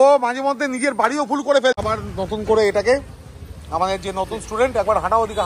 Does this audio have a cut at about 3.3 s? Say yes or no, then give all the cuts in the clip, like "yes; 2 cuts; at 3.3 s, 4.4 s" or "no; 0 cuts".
no; 1 cut; at 1.8 s